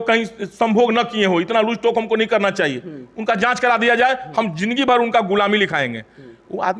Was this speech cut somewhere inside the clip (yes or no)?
no